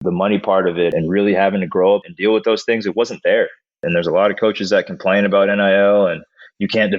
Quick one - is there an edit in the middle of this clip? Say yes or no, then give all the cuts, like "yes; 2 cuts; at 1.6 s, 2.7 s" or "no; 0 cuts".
yes; 3 cuts; at 0.9 s, 2.1 s, 3.8 s